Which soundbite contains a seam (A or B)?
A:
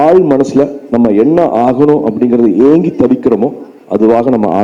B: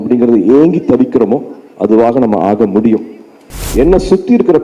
B